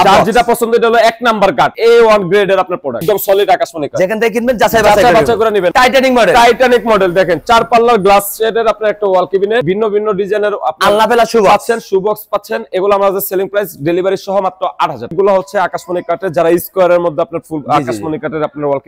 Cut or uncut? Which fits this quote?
cut